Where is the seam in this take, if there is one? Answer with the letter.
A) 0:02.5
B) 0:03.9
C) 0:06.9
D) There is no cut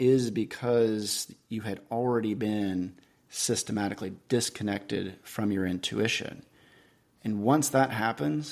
D